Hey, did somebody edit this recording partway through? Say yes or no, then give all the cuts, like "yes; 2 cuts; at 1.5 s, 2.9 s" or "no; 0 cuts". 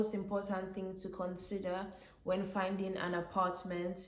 no; 0 cuts